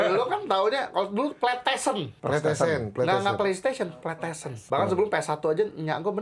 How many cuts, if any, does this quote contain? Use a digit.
2